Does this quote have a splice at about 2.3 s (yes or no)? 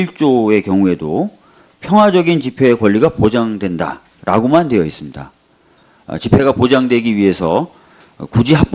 yes